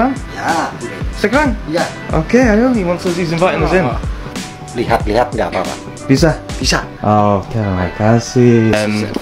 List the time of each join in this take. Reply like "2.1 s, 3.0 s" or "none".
none